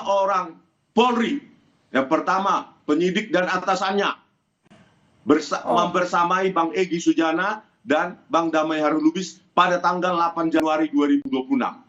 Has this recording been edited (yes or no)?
no